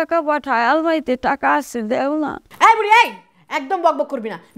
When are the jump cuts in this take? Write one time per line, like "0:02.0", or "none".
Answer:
0:02.4

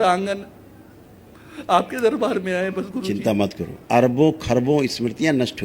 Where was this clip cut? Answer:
0:03.7

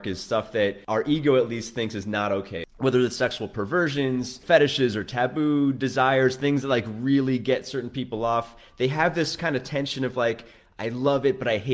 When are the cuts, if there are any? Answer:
0:00.8
0:02.6
0:04.4

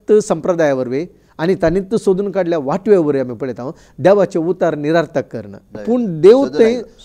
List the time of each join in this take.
0:05.7

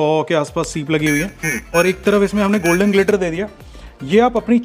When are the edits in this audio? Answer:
none

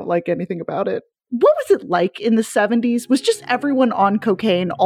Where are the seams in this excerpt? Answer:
0:01.2

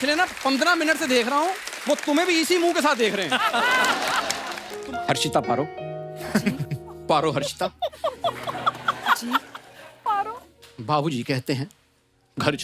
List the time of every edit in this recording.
0:04.6

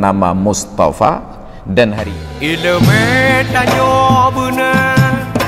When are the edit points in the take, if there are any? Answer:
0:02.0

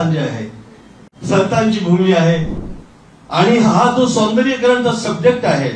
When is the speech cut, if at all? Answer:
0:02.6

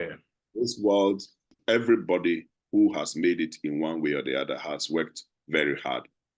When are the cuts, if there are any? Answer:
0:01.5

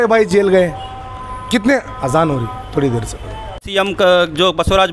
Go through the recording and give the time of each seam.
0:03.6

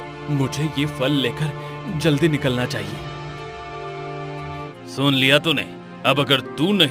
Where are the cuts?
0:04.6

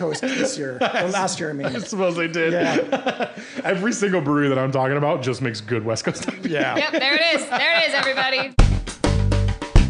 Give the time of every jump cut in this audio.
0:08.5

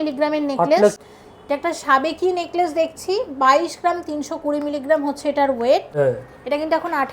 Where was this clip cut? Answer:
0:01.0
0:05.9

